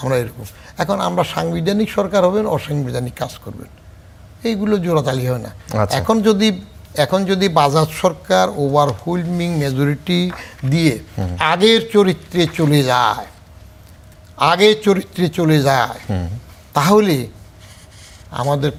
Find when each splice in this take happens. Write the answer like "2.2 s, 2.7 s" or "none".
none